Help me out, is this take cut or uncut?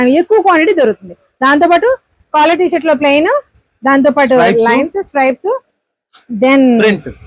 uncut